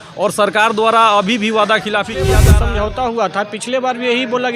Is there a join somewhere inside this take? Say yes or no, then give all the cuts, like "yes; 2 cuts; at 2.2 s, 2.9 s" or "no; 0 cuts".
yes; 1 cut; at 2.4 s